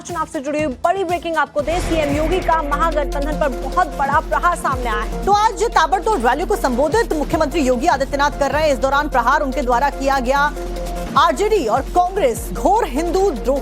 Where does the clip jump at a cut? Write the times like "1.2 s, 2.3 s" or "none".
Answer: 1.3 s